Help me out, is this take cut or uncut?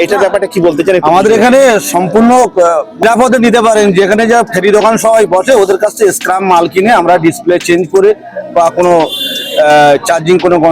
cut